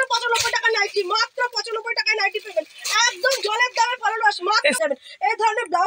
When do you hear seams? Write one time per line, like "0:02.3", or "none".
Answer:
0:04.8